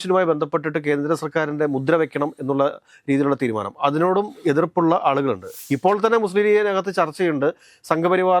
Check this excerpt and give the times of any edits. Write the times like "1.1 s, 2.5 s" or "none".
5.5 s